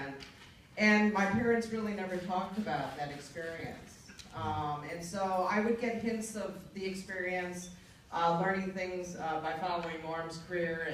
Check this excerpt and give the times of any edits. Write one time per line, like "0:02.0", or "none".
0:09.7